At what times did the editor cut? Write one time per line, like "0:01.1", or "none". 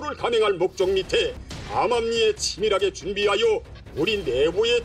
0:01.4